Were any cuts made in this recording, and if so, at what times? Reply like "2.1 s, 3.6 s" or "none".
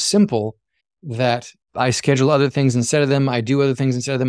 none